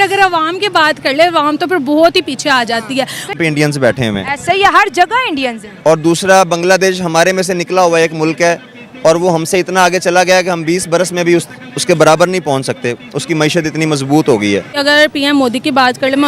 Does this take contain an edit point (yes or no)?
yes